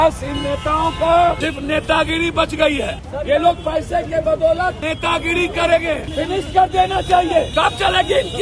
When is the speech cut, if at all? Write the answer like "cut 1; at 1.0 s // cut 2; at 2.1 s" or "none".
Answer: cut 1; at 1.4 s // cut 2; at 3.0 s // cut 3; at 4.8 s // cut 4; at 6.1 s // cut 5; at 7.5 s